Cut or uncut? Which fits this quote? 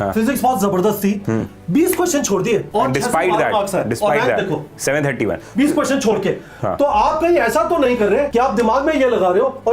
cut